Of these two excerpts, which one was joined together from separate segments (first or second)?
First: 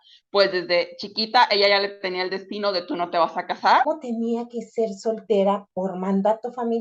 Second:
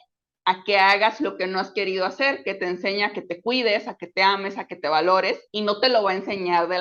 first